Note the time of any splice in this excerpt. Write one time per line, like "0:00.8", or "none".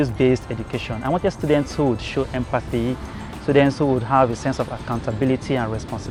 none